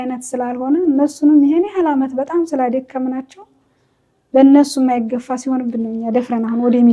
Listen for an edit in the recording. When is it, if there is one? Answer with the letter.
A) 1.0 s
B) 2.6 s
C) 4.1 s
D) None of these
D